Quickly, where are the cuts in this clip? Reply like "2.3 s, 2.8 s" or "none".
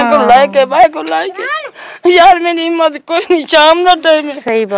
none

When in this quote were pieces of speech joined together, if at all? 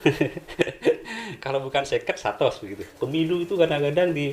2.8 s

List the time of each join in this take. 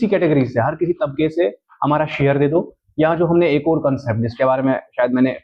none

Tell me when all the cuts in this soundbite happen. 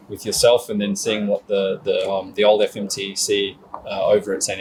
none

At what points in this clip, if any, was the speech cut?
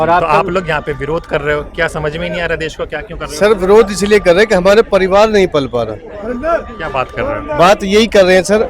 none

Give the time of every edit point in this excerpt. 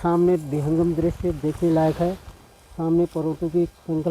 none

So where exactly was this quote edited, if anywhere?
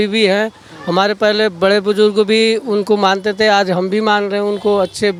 none

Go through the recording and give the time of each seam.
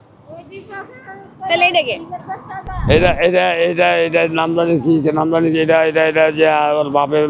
none

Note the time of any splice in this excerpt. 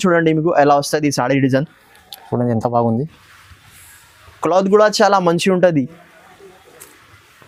none

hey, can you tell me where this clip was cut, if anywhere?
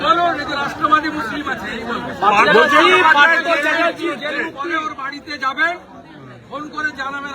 none

